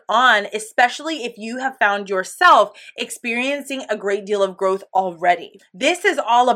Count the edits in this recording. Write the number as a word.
one